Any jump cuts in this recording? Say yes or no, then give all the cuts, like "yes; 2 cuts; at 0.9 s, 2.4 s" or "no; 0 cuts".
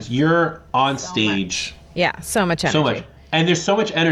no; 0 cuts